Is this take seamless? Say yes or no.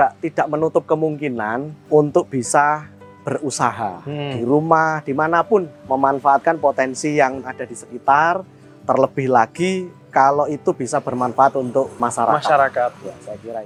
yes